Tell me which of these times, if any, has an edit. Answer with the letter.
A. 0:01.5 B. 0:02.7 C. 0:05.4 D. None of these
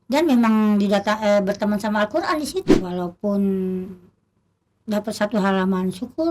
B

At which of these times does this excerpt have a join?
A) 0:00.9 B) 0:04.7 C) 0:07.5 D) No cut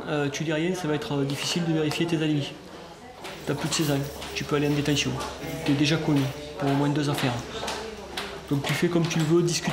D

